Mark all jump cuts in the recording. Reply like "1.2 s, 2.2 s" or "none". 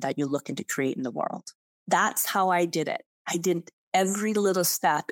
1.7 s